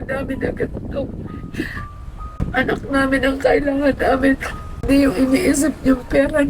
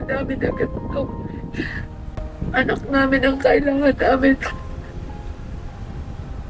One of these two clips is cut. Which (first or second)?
first